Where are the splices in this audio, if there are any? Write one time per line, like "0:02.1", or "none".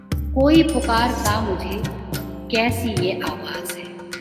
0:03.3